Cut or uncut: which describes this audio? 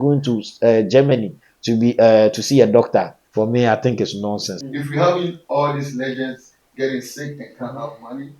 cut